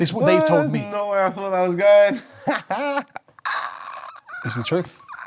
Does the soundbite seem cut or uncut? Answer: uncut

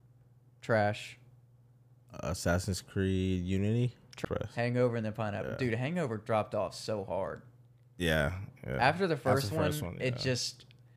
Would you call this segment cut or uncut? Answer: cut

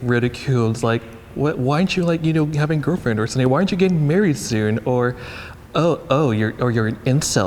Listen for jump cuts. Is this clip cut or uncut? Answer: uncut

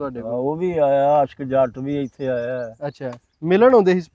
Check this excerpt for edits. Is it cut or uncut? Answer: uncut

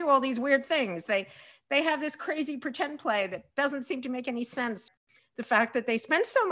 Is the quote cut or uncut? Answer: cut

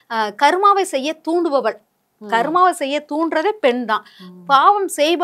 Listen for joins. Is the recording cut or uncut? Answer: uncut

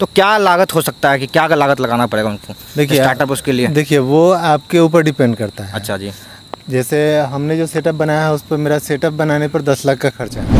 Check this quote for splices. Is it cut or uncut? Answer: uncut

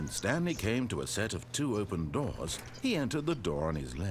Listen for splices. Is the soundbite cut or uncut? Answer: uncut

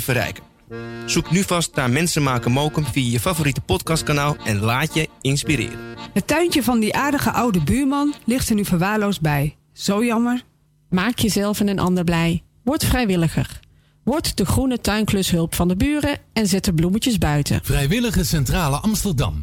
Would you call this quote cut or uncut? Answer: cut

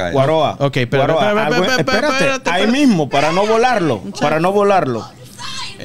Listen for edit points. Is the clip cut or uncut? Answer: uncut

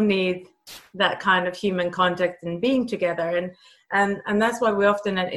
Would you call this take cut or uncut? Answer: uncut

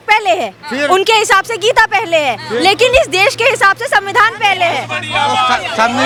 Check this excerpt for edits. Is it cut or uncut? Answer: uncut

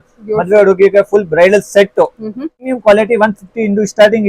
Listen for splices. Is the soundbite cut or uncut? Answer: cut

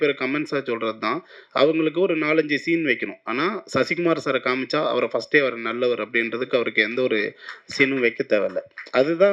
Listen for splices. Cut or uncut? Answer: uncut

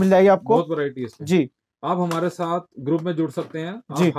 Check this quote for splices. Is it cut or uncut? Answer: uncut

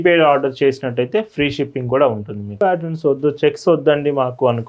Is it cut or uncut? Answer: cut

